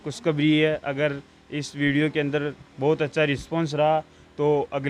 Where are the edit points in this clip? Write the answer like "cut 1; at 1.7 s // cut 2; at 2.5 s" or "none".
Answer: none